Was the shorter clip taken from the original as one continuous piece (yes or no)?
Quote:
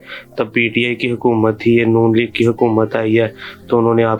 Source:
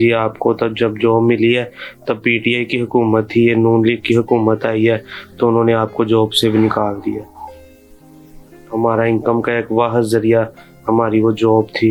yes